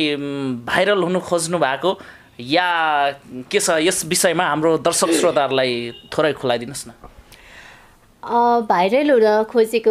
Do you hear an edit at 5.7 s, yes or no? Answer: no